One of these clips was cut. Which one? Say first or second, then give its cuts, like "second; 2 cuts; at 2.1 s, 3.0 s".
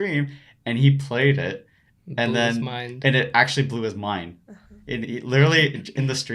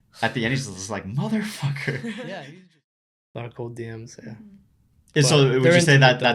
second; 1 cut; at 3.2 s